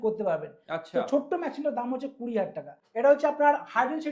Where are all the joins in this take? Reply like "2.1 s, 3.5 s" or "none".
2.8 s